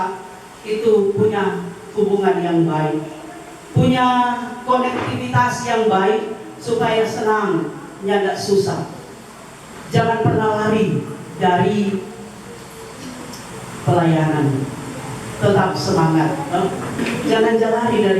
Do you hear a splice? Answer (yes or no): yes